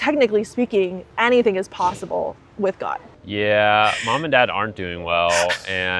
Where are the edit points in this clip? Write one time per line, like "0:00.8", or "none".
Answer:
0:01.0
0:03.1